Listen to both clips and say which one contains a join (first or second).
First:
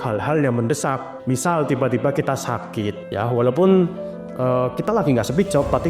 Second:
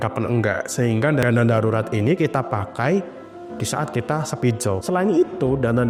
first